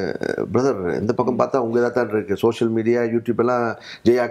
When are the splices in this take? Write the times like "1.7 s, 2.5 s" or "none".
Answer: none